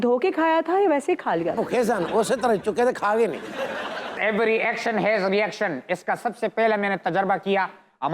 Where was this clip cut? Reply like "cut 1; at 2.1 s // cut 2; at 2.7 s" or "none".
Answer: cut 1; at 4.1 s